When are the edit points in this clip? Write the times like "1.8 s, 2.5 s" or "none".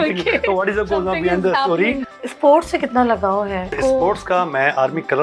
2.1 s, 3.8 s